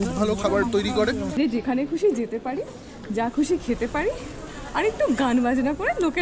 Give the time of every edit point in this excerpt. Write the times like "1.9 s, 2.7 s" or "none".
1.3 s